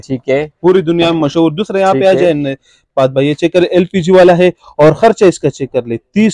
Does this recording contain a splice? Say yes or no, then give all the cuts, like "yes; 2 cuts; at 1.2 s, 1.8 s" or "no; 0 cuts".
no; 0 cuts